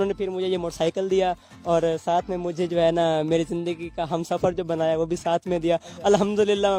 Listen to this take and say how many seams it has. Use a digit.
0